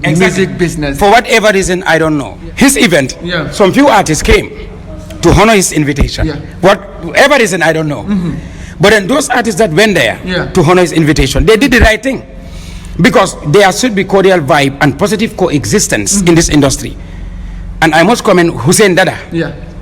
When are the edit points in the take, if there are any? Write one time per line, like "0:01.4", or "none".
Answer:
0:02.4